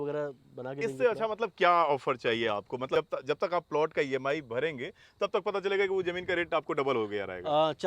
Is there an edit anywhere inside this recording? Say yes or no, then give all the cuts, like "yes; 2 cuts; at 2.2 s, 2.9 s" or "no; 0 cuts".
yes; 1 cut; at 3.0 s